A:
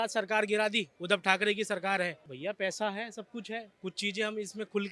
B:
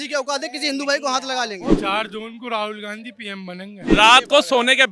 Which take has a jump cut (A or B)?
B